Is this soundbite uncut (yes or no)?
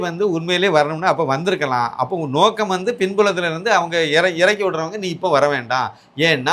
yes